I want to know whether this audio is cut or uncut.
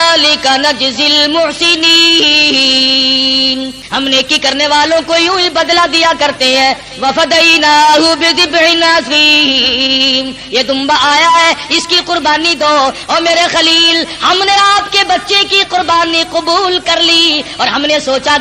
cut